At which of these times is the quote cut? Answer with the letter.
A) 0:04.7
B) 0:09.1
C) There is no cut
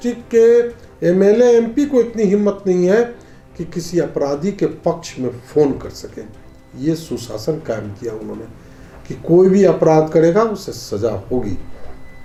C